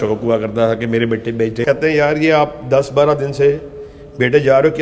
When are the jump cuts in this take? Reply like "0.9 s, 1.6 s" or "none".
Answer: 1.6 s